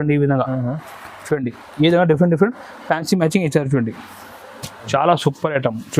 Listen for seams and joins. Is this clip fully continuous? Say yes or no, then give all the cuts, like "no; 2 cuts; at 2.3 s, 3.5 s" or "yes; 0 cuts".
no; 1 cut; at 4.9 s